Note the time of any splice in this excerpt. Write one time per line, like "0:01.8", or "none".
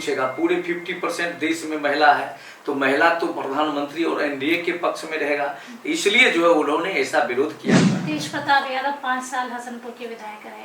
0:07.8